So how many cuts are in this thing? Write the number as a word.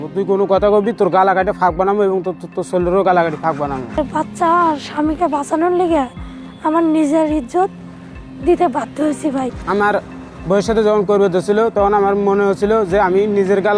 two